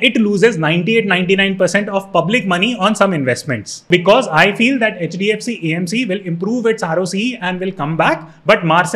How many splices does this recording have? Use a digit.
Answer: 1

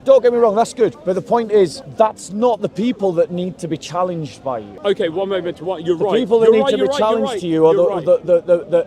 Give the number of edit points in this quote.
3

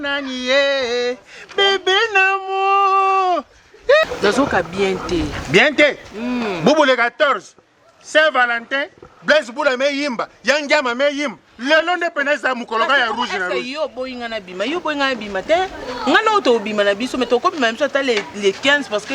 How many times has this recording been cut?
1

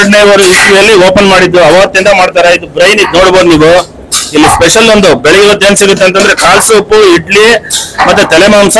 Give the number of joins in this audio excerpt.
0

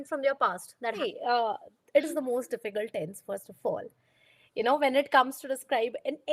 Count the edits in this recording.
1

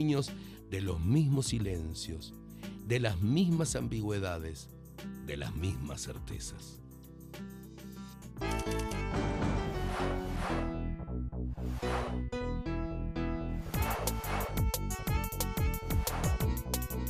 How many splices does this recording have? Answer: 0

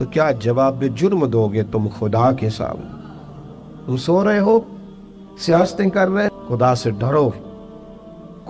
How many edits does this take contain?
1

